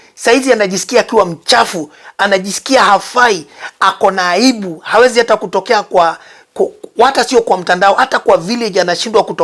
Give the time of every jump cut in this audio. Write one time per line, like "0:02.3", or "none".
none